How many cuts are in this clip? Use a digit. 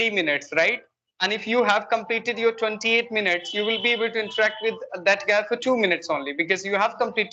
0